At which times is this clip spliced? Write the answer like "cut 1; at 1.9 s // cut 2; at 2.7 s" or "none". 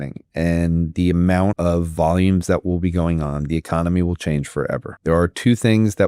cut 1; at 1.6 s // cut 2; at 4.9 s